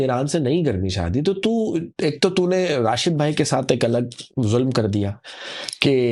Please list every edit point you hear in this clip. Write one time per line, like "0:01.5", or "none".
none

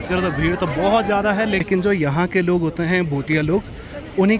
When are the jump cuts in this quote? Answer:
0:01.6

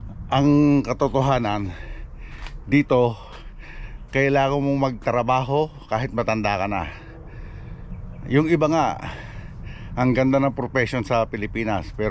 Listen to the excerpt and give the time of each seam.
none

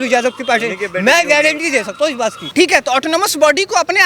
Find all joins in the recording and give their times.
0:02.4

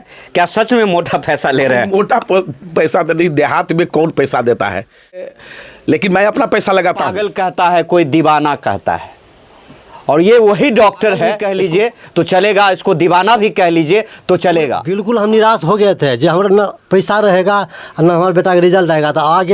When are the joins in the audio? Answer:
0:05.3
0:07.3
0:11.4
0:14.9

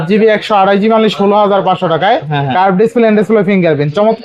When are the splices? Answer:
none

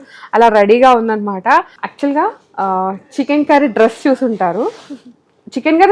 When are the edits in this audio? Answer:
0:01.8

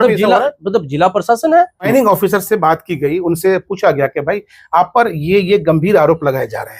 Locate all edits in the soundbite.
0:01.9

